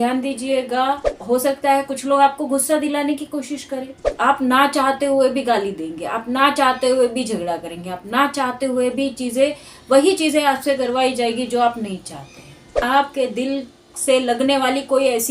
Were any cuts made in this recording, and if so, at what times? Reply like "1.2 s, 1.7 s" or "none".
1.1 s, 4.0 s, 12.8 s